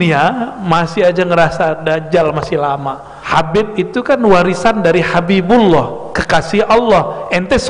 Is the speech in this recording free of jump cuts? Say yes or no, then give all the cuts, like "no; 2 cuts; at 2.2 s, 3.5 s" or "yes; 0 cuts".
no; 1 cut; at 3.1 s